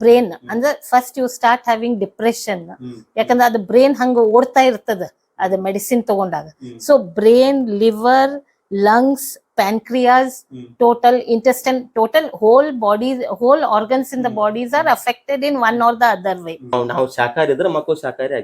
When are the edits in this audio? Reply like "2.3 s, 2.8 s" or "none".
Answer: 16.7 s